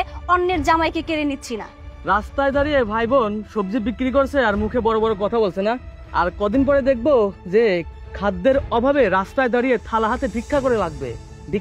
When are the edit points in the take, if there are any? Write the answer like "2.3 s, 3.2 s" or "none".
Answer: 6.0 s